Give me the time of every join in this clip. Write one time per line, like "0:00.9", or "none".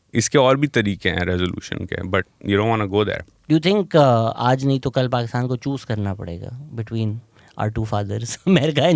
0:03.3